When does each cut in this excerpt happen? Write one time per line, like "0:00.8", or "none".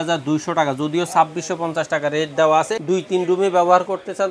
0:02.8